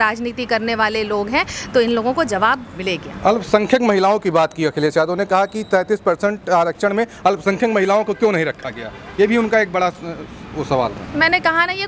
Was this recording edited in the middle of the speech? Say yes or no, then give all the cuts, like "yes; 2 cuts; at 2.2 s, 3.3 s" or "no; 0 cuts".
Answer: no; 0 cuts